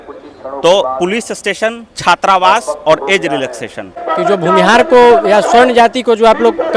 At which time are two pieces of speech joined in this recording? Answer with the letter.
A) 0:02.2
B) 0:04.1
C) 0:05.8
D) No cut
B